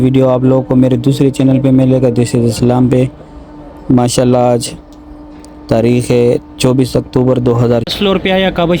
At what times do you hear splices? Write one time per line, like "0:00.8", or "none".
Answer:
0:07.9